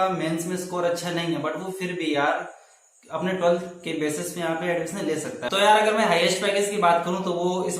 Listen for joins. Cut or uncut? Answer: cut